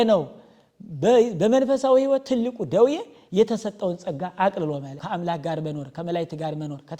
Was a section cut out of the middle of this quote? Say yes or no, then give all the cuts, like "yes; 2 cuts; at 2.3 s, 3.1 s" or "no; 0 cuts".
yes; 1 cut; at 4.9 s